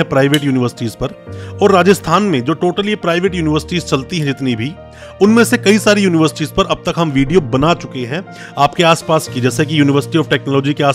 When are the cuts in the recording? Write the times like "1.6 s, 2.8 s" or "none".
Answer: none